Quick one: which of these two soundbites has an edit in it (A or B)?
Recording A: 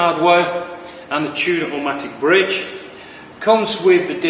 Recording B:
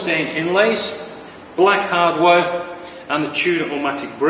B